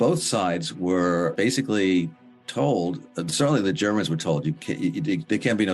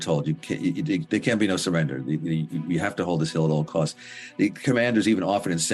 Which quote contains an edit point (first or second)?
first